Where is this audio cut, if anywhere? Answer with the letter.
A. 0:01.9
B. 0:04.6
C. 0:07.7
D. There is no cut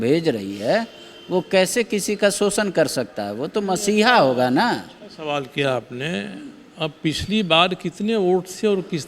D